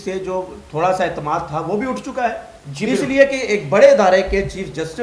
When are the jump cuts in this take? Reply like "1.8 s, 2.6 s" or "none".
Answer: none